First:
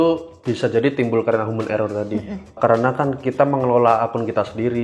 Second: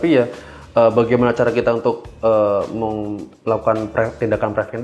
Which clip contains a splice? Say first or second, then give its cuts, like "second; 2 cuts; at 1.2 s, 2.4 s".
first; 1 cut; at 2.6 s